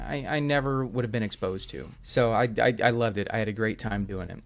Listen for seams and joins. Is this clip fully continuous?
yes; 0 cuts

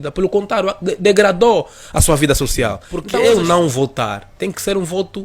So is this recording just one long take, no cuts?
no; 1 cut; at 2.9 s

